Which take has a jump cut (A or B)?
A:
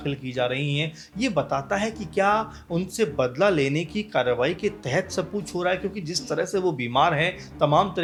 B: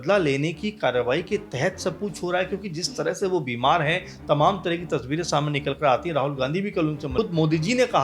B